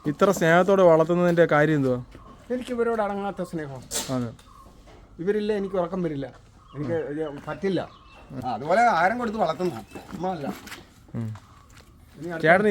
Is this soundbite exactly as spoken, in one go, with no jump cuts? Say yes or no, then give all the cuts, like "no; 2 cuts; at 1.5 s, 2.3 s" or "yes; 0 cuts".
no; 1 cut; at 8.4 s